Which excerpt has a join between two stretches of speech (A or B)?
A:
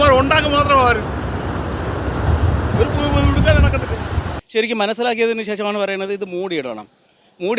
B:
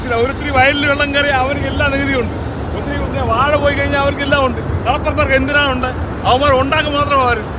A